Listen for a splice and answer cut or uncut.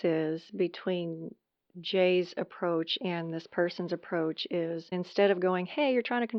cut